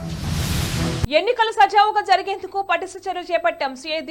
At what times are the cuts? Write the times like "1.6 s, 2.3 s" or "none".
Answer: 1.1 s

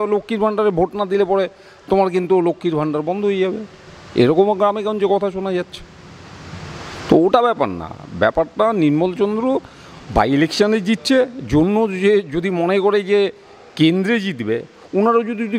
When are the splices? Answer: none

